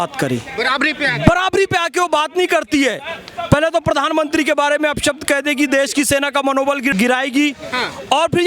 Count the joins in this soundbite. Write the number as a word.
one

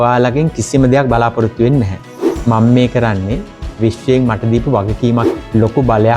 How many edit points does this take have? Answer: one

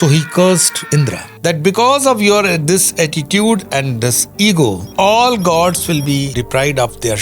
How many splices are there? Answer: one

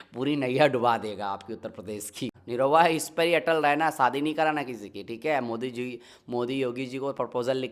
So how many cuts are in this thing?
one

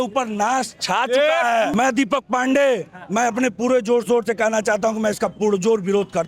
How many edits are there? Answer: one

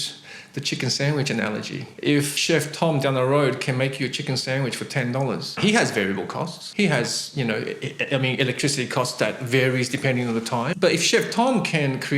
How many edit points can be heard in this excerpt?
three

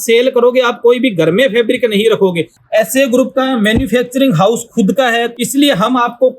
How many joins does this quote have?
two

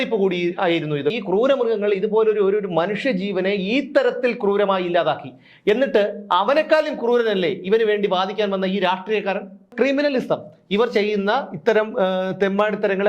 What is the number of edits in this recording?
two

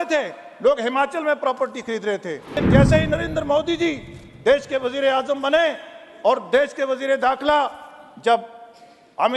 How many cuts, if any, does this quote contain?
one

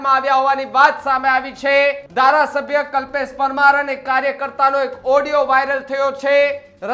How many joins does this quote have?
one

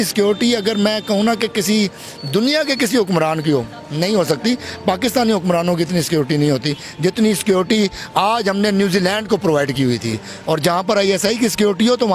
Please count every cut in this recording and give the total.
one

